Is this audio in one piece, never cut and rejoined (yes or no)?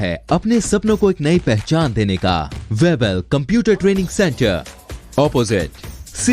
no